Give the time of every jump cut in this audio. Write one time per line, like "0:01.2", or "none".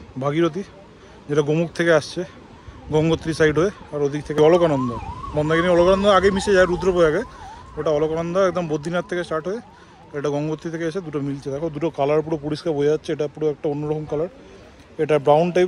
0:04.4